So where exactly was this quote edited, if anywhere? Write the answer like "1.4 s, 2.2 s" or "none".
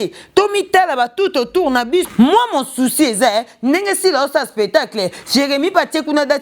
2.1 s